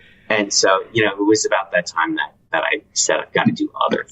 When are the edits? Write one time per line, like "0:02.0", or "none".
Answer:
0:02.4